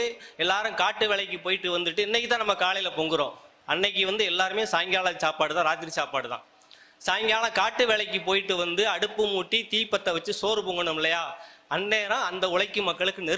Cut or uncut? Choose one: uncut